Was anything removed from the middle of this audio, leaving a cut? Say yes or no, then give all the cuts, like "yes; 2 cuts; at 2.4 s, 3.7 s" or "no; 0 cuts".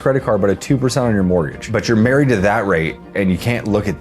yes; 1 cut; at 1.6 s